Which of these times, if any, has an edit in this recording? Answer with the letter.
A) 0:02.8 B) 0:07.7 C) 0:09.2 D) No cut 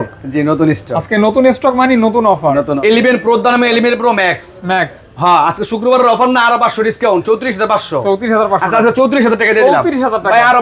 A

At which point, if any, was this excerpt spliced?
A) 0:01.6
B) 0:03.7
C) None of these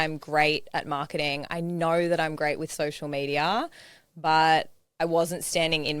C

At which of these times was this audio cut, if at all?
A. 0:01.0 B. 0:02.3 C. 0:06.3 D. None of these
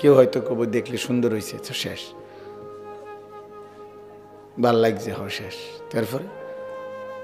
C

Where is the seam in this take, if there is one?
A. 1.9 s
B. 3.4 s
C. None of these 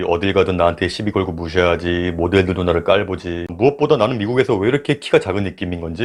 C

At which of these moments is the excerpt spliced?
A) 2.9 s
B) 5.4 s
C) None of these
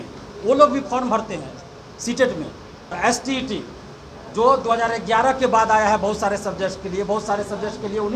A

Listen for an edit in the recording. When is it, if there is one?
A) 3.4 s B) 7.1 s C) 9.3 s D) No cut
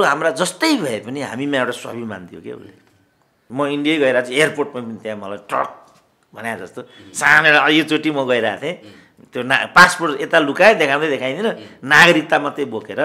A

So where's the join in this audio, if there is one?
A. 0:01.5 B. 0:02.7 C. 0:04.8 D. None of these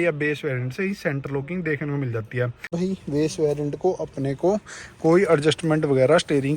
B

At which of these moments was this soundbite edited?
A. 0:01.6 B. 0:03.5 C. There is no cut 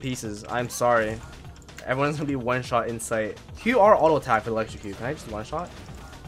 B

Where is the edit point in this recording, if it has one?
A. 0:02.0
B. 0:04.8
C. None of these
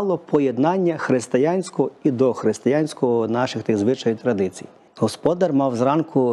B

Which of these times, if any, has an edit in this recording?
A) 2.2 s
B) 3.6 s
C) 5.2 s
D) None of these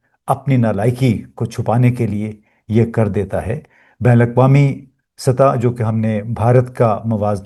D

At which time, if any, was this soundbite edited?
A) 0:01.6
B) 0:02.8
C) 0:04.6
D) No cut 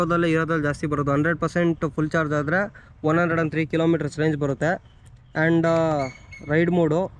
D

